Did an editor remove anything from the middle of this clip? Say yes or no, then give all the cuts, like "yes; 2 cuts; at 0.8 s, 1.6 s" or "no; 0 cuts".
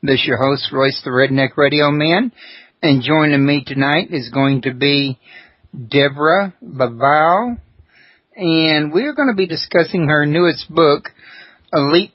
no; 0 cuts